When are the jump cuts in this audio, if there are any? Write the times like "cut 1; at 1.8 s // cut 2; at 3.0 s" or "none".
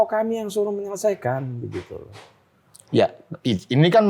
none

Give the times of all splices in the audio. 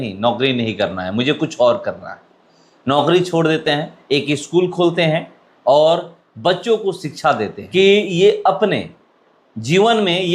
cut 1; at 3.9 s // cut 2; at 7.6 s

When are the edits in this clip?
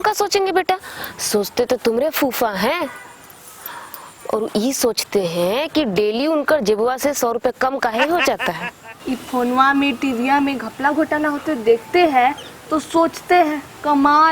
cut 1; at 8.9 s

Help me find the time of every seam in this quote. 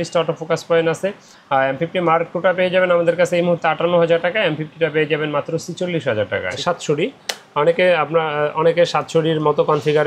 cut 1; at 6.6 s

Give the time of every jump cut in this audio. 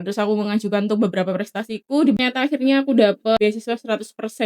cut 1; at 2.2 s // cut 2; at 3.4 s

